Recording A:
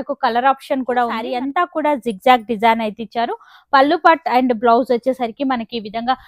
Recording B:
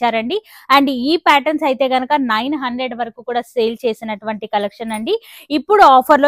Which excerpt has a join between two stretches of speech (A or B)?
A